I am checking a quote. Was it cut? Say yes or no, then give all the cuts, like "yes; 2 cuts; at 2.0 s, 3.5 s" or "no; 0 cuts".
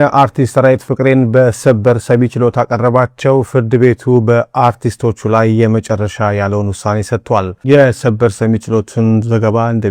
no; 0 cuts